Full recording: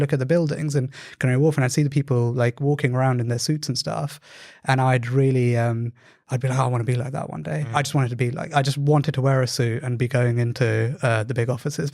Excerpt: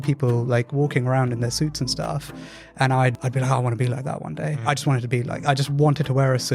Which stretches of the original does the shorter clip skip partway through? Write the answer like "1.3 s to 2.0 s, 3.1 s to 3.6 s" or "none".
5.1 s to 6.3 s